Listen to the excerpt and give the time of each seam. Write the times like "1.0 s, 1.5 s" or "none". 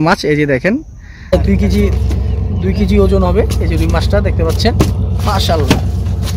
1.3 s